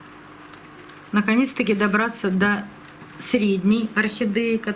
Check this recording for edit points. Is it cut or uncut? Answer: uncut